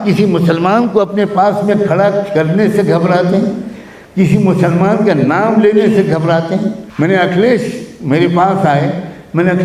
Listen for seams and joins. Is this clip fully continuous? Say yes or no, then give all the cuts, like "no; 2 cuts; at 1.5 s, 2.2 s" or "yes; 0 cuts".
no; 1 cut; at 6.8 s